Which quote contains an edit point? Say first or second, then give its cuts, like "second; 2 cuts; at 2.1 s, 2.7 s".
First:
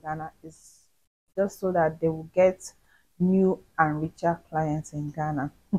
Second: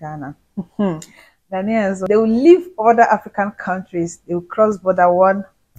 second; 1 cut; at 2.1 s